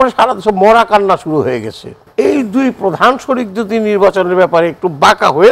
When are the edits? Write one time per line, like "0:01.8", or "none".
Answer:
0:01.9

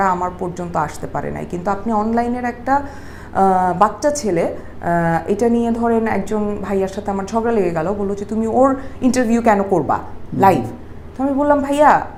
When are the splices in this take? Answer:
none

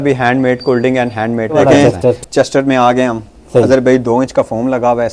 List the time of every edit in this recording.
0:01.5

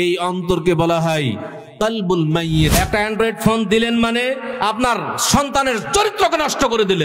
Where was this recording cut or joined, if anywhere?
0:02.7

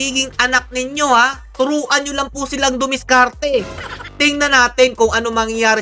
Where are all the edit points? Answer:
none

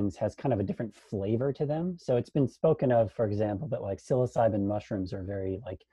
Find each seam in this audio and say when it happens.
none

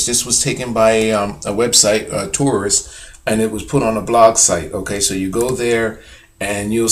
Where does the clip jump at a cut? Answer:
none

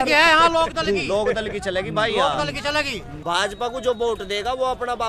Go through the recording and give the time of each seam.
0:03.1

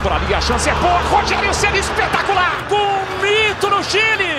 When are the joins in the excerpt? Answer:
0:02.6

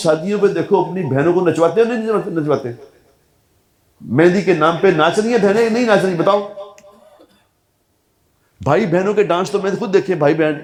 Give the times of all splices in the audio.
none

